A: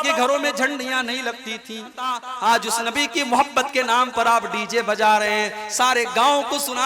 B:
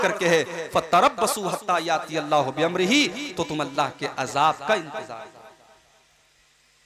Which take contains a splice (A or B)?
A